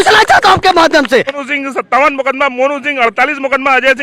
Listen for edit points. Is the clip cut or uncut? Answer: cut